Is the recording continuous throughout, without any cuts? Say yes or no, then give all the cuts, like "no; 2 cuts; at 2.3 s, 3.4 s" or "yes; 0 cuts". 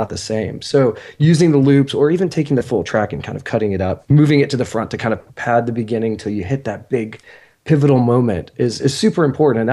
no; 2 cuts; at 4.0 s, 5.3 s